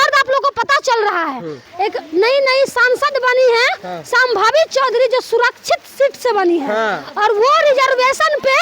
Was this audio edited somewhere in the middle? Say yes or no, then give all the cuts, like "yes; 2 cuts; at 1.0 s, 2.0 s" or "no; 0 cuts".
yes; 1 cut; at 1.6 s